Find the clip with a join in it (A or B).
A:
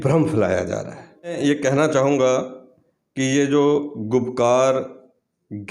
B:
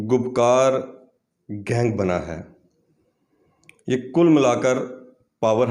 A